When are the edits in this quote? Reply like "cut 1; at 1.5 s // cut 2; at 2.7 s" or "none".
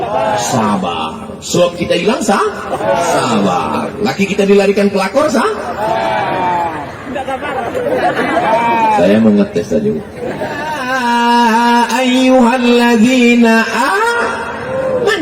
cut 1; at 10.8 s